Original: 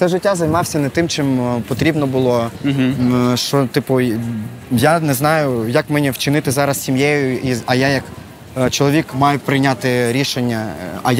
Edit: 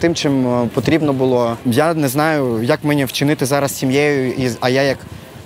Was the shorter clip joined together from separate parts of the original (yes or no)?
yes